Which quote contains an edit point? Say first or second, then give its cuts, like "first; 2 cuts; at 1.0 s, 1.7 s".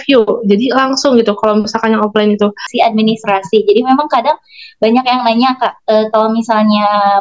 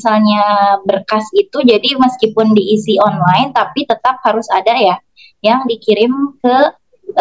first; 1 cut; at 2.7 s